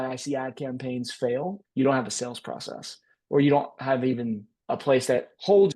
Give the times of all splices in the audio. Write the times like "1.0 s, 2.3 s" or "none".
1.6 s